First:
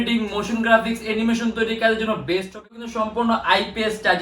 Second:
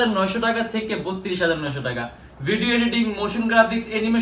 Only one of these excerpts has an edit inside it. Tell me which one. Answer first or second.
first